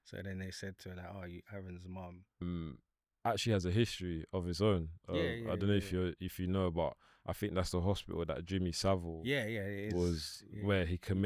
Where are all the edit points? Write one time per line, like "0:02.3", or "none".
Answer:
0:02.4

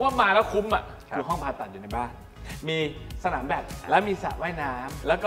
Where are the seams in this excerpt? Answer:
0:01.0
0:03.7

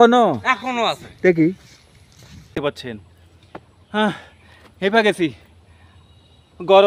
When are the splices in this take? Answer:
0:02.5

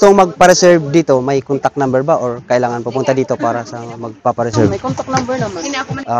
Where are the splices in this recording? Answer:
none

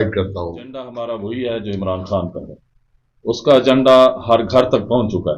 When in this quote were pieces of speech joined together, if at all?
0:00.9

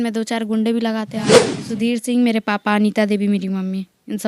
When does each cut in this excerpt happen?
0:01.4

